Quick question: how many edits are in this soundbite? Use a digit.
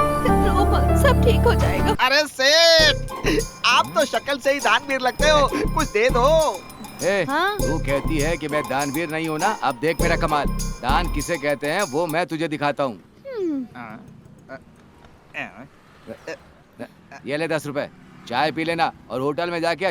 1